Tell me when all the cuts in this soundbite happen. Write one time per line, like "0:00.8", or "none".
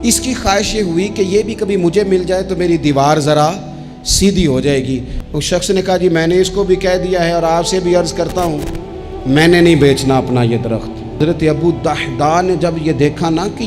0:05.1
0:11.2